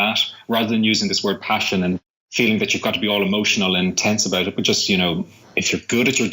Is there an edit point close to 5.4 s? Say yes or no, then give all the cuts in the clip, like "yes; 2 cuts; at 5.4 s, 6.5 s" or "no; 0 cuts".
no; 1 cut; at 2.2 s